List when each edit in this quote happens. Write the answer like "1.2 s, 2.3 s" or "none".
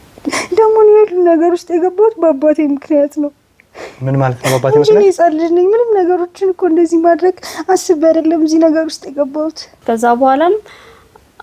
9.7 s

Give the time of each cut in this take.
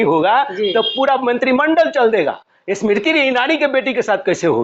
none

